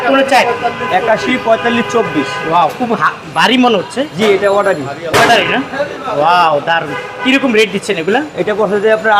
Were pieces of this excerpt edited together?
no; 0 cuts

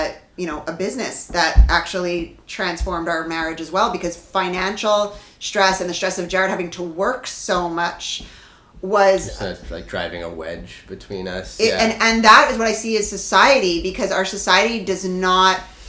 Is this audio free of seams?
yes; 0 cuts

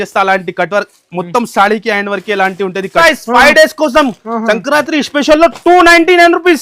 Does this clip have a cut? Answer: yes; 1 cut; at 2.9 s

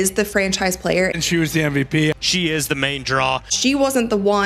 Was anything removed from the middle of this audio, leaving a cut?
no; 0 cuts

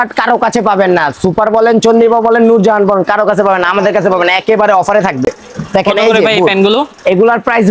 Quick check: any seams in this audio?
no; 0 cuts

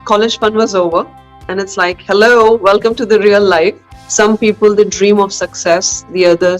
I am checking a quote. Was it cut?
yes; 1 cut; at 3.9 s

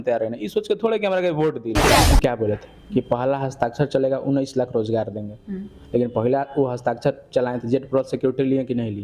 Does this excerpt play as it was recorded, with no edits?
no; 1 cut; at 2.1 s

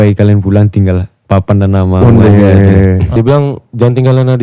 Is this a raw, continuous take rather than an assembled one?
no; 1 cut; at 3.1 s

